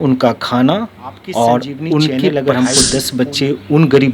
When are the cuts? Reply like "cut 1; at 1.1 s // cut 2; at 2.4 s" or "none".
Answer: cut 1; at 2.2 s